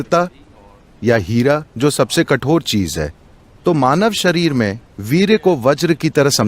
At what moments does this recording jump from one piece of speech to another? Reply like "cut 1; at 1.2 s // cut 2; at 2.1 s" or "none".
none